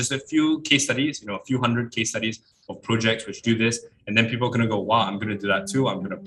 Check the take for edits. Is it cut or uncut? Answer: uncut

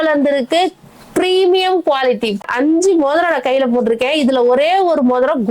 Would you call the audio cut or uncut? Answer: cut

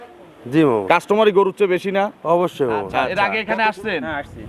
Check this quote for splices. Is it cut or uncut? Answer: cut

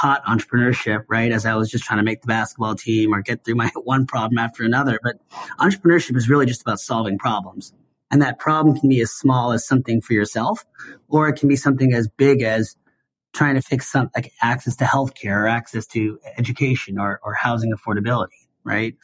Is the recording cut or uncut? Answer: cut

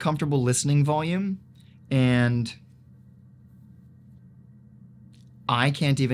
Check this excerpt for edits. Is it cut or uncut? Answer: uncut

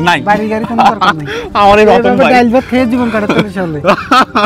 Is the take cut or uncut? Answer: uncut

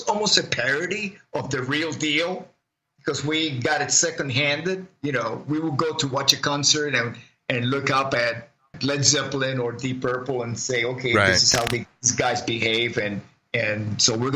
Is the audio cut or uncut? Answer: cut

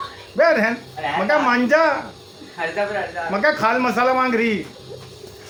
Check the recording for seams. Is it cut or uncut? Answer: uncut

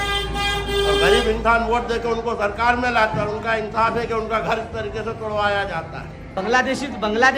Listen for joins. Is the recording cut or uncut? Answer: cut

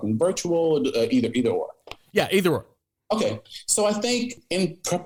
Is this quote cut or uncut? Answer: uncut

